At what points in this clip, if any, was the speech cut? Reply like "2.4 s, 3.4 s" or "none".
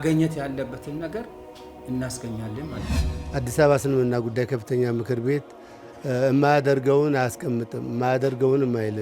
3.0 s